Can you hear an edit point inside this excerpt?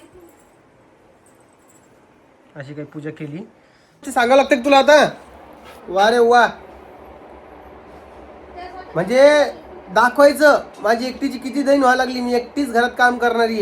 yes; 1 cut; at 4.1 s

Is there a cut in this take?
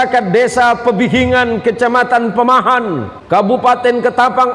yes; 1 cut; at 3.1 s

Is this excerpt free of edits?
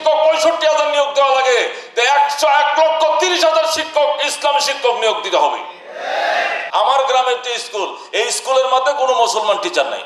no; 1 cut; at 6.6 s

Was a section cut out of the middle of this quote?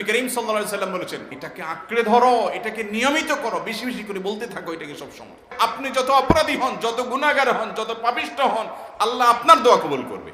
yes; 2 cuts; at 1.4 s, 5.5 s

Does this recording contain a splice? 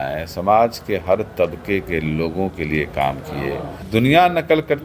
yes; 1 cut; at 3.7 s

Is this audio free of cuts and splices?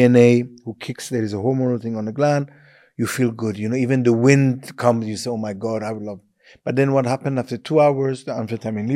yes; 0 cuts

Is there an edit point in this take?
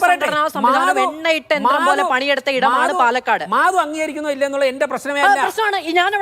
no; 0 cuts

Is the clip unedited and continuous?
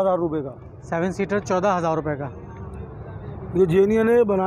yes; 0 cuts

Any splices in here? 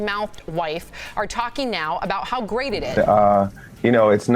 yes; 1 cut; at 2.9 s

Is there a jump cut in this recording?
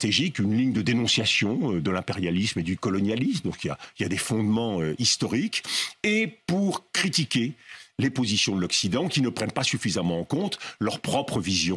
no; 0 cuts

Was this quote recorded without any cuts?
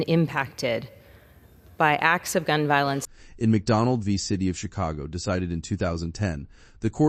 yes; 0 cuts

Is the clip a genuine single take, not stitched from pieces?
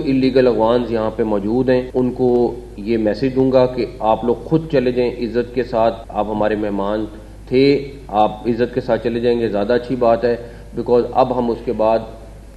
no; 2 cuts; at 1.9 s, 6.0 s

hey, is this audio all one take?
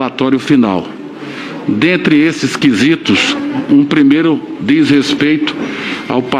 yes; 0 cuts

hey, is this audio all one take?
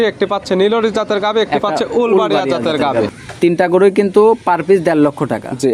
no; 1 cut; at 3.1 s

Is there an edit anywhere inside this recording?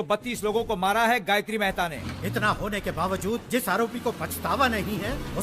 yes; 1 cut; at 1.9 s

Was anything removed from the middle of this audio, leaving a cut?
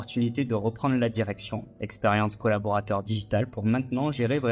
no; 0 cuts

